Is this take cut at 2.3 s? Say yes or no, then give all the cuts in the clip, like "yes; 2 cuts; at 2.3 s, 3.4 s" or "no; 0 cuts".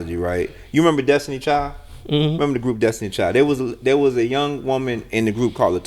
no; 0 cuts